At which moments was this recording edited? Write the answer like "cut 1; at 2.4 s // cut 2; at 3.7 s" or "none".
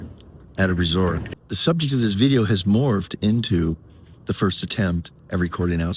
cut 1; at 1.3 s